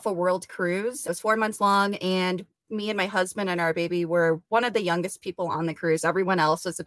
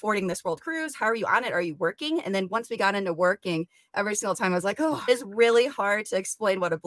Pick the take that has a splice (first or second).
second